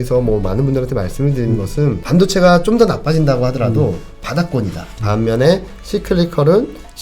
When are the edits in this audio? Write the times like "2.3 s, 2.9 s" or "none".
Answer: 2.0 s, 4.9 s